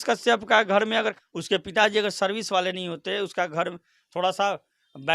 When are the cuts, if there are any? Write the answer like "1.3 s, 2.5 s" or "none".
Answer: 1.2 s